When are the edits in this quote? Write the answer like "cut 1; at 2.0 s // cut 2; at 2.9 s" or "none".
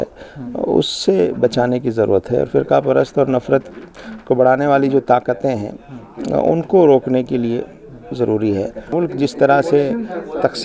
cut 1; at 8.9 s